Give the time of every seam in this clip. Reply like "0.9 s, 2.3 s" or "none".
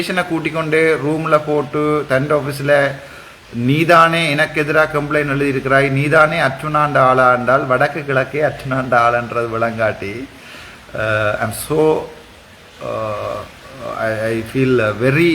none